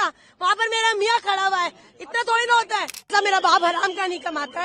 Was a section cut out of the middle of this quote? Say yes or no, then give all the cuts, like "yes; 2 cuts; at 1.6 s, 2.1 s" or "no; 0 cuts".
yes; 1 cut; at 3.1 s